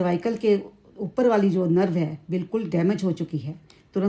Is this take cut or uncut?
uncut